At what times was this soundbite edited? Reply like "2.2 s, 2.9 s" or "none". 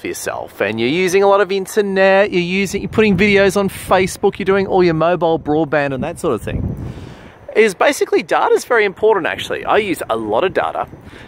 9.9 s

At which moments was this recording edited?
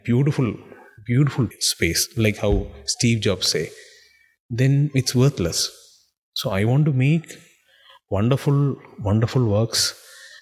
1.5 s

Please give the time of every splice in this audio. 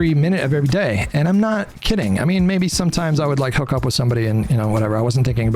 none

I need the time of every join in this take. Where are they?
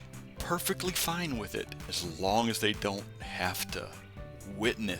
1.8 s

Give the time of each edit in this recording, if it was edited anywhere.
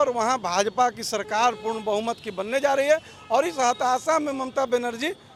none

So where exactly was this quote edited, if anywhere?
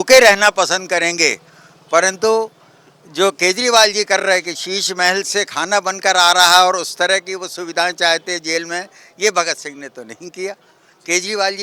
none

